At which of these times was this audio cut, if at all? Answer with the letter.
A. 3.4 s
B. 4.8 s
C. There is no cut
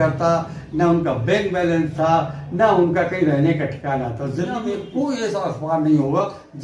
B